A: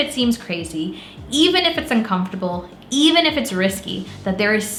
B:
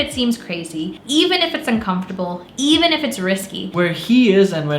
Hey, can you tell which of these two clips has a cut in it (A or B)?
B